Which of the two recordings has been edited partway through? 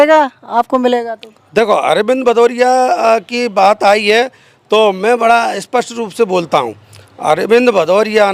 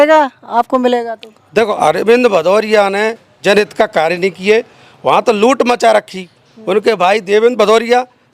second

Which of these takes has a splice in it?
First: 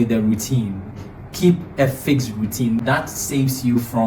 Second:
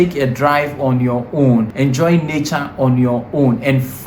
second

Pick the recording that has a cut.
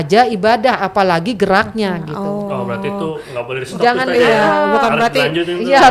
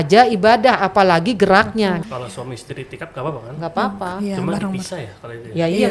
second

